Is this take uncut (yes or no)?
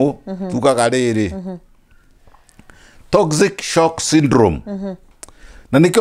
yes